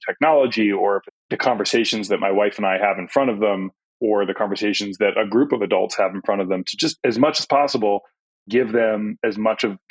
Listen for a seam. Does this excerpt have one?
yes; 2 cuts; at 1.1 s, 3.8 s

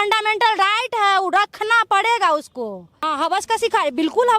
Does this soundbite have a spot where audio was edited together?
yes; 1 cut; at 3.1 s

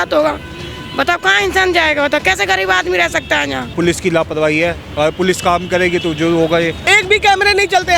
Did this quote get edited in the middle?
yes; 2 cuts; at 3.7 s, 6.8 s

